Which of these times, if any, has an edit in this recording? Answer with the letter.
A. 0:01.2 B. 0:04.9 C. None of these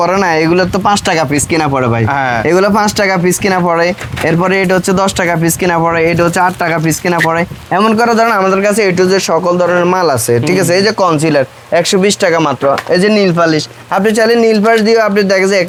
C